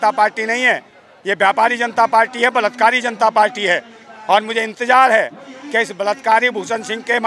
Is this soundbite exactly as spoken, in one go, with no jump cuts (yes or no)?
yes